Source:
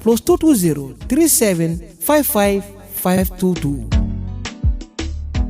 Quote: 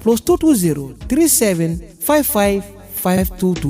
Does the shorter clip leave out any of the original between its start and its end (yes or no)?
no